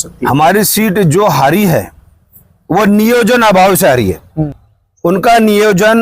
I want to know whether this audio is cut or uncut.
cut